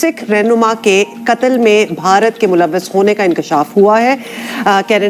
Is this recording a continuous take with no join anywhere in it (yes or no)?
yes